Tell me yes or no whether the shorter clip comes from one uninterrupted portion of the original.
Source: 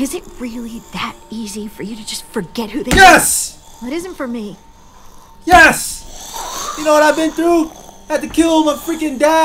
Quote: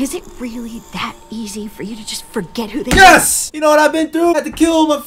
no